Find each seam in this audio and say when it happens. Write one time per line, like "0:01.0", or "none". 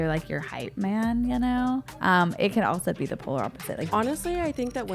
0:01.9
0:03.8